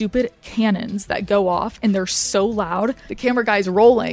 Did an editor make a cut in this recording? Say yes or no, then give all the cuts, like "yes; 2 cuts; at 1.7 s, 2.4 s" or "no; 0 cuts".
yes; 1 cut; at 3.1 s